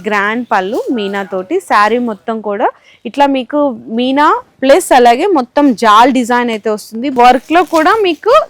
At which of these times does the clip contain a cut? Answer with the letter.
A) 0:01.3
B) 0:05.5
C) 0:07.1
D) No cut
C